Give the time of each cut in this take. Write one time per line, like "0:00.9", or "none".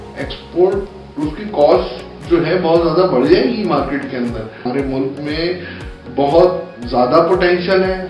0:04.6